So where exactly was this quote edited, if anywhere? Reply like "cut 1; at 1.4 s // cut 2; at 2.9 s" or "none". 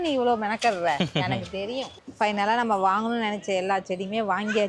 cut 1; at 2.0 s